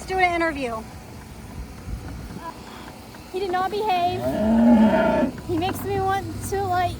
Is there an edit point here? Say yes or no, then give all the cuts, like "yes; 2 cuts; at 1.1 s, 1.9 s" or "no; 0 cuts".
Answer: yes; 1 cut; at 2.4 s